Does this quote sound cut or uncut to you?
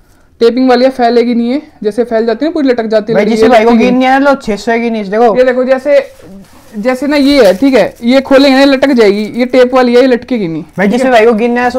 uncut